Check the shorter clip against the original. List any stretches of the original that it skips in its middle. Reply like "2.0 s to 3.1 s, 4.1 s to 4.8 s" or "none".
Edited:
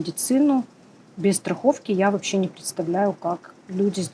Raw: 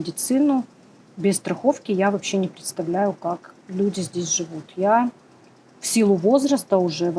none